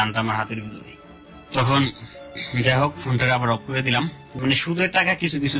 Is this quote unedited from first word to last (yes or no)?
no